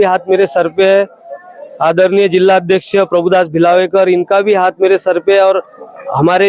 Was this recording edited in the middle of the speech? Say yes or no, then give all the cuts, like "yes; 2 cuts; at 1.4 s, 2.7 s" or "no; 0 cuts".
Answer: no; 0 cuts